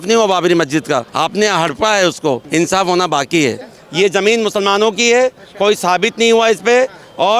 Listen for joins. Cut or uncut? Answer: cut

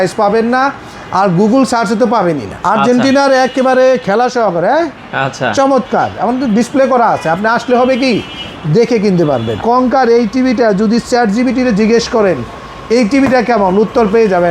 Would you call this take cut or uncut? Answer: cut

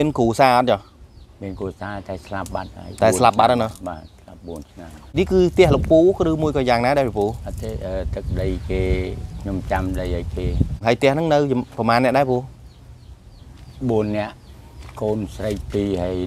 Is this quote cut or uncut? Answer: cut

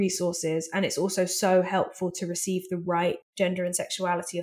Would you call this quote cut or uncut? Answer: cut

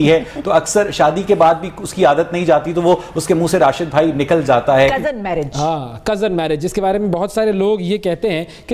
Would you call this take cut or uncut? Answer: cut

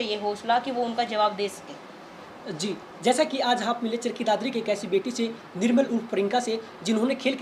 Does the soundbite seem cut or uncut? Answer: uncut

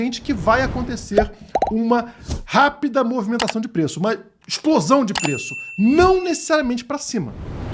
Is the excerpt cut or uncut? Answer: uncut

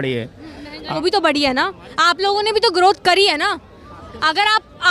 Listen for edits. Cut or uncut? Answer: cut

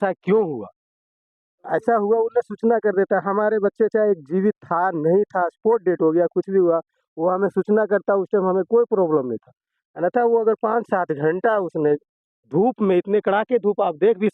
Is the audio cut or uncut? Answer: uncut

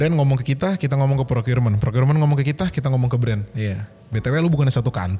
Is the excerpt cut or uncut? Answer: uncut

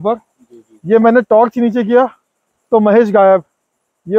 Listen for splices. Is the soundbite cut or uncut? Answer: uncut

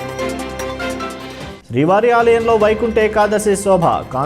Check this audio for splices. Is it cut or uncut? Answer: uncut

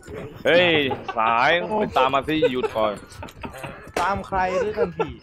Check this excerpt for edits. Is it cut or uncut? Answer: uncut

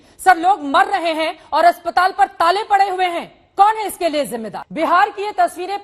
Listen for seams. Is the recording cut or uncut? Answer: cut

